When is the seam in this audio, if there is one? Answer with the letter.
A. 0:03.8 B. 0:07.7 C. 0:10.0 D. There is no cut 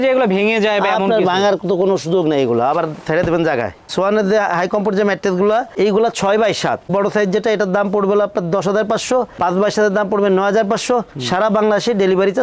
D